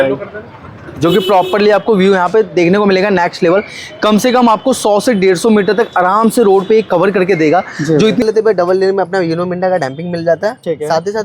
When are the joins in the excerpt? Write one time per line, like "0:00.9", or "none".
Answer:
0:08.2